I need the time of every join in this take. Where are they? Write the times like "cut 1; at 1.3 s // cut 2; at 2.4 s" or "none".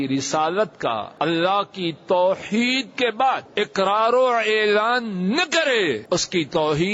cut 1; at 1.1 s // cut 2; at 3.5 s // cut 3; at 6.0 s